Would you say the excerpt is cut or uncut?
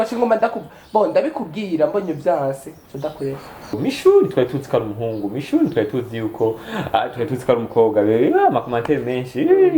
cut